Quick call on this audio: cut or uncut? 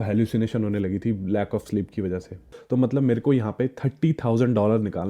cut